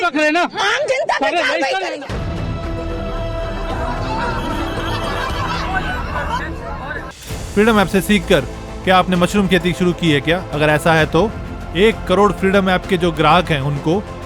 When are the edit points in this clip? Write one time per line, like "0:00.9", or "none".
0:07.2

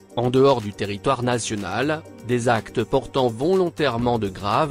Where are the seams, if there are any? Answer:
none

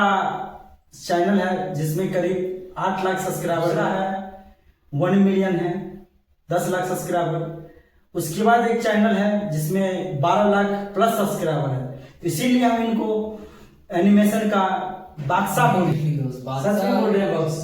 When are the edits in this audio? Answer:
0:03.9
0:15.9

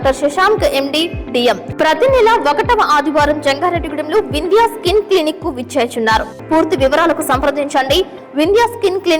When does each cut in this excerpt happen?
0:01.7
0:06.4

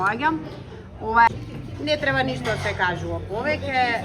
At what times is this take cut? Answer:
0:01.3

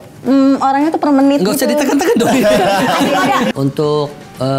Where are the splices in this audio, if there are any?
0:03.5

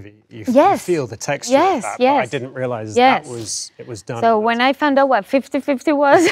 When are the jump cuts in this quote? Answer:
none

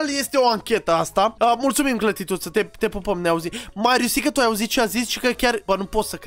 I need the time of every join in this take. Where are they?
none

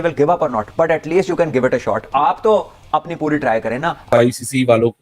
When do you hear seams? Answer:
0:04.0

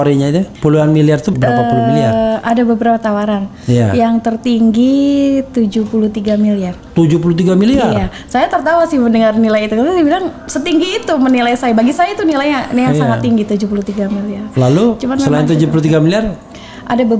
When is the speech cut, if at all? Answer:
0:01.3

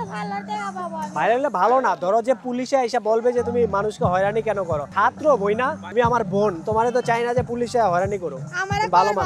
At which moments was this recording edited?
none

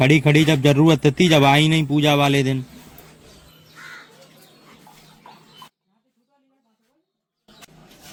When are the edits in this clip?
none

